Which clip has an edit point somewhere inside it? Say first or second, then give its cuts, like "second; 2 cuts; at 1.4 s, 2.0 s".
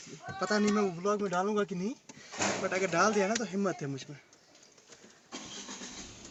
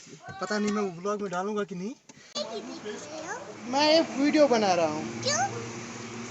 second; 1 cut; at 2.3 s